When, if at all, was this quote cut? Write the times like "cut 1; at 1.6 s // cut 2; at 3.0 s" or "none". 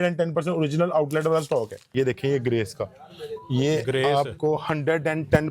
cut 1; at 1.9 s